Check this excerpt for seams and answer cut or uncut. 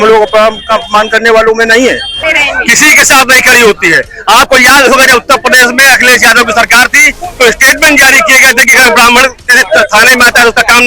cut